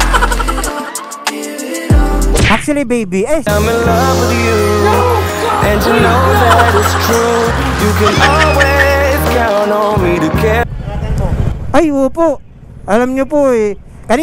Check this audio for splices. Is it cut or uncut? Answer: cut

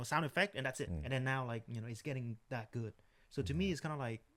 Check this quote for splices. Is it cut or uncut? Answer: cut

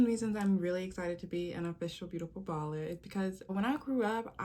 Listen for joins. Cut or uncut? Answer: cut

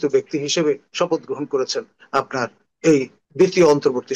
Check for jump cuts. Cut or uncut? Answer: cut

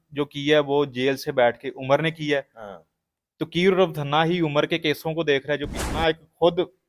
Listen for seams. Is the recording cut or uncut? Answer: cut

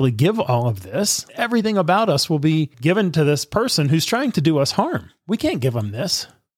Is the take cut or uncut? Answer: cut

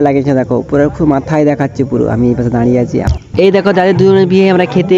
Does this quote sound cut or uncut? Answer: cut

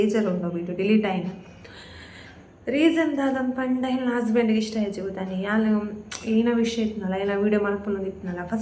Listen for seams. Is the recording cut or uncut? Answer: uncut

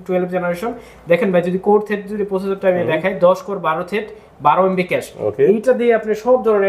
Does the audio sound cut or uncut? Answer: uncut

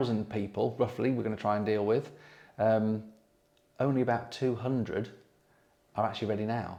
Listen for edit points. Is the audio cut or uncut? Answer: uncut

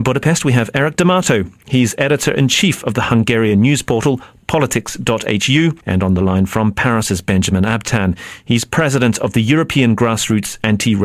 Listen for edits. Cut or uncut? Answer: uncut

